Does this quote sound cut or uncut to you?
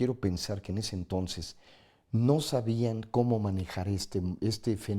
uncut